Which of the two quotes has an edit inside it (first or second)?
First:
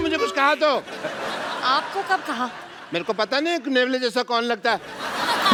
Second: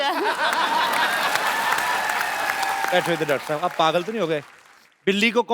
second